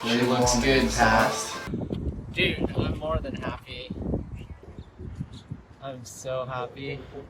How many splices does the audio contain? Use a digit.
2